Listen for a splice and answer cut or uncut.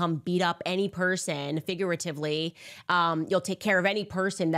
uncut